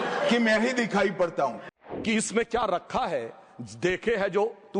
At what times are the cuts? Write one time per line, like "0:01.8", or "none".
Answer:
0:01.7